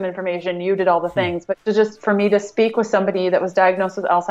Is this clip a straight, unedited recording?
no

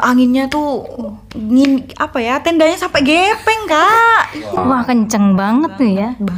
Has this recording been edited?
no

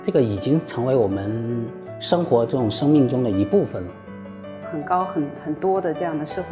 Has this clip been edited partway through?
yes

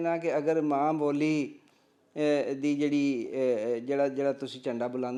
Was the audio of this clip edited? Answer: no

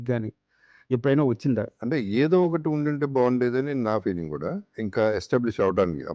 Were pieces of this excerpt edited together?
yes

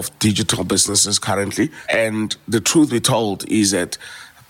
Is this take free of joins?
no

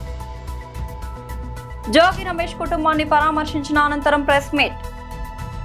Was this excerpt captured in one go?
yes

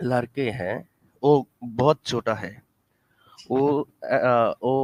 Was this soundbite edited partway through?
no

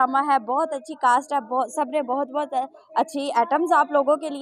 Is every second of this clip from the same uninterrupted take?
yes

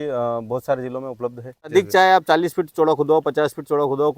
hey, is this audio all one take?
no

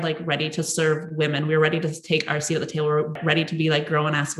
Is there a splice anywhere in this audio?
yes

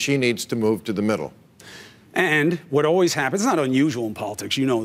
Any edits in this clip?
yes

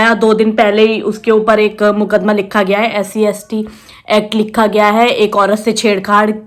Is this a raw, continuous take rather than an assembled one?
yes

